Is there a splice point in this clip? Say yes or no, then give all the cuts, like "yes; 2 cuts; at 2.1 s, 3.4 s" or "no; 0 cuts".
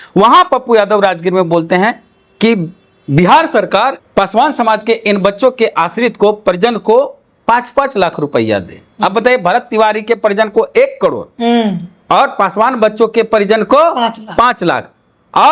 yes; 1 cut; at 4.0 s